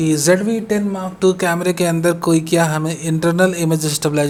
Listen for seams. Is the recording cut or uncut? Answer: uncut